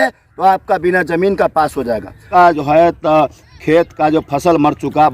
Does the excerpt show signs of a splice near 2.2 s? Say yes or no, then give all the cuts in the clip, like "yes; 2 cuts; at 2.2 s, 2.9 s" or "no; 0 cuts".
yes; 1 cut; at 2.2 s